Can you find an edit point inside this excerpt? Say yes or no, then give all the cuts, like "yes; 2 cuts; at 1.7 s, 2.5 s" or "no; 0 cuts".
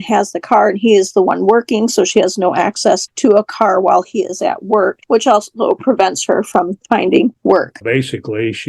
yes; 3 cuts; at 3.1 s, 5.0 s, 7.7 s